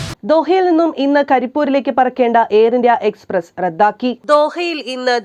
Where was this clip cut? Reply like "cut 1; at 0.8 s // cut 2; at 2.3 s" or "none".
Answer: none